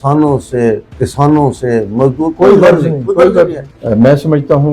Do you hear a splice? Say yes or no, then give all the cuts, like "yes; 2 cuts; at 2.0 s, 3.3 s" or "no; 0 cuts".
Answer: yes; 1 cut; at 3.7 s